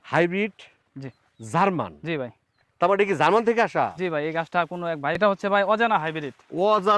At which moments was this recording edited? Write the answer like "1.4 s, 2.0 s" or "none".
5.2 s